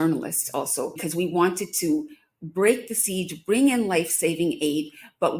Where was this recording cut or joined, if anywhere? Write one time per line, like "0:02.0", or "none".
0:01.0